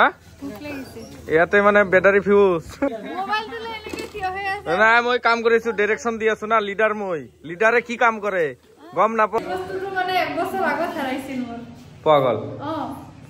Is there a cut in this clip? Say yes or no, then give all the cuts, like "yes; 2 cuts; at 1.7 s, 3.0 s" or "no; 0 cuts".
yes; 2 cuts; at 2.9 s, 9.4 s